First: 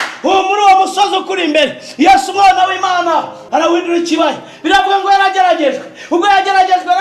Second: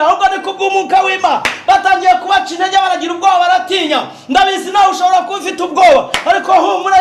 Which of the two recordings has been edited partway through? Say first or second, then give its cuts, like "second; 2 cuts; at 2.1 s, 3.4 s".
first; 1 cut; at 3.4 s